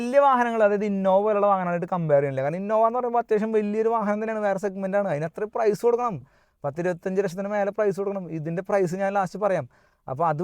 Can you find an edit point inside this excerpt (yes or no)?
no